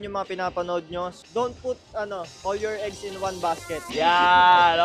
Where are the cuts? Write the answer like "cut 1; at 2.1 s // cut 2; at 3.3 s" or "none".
cut 1; at 3.9 s